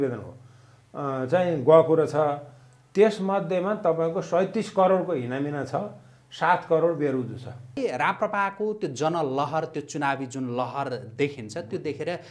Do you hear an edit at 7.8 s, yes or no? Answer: yes